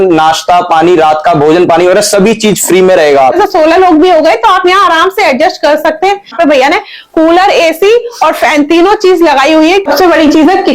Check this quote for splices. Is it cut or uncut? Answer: cut